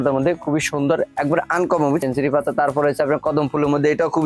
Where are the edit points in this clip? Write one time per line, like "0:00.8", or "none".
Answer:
0:02.0